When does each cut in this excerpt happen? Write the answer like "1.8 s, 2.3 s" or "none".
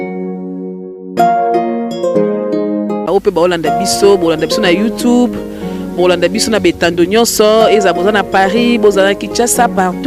1.0 s